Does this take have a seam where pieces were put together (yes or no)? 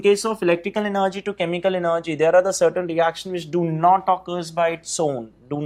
no